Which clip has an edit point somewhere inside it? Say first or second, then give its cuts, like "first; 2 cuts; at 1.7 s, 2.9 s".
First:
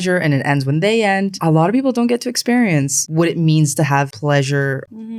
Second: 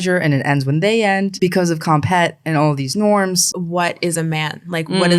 second; 2 cuts; at 1.3 s, 3.4 s